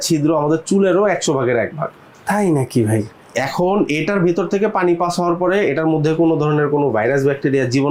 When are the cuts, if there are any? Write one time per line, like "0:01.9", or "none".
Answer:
none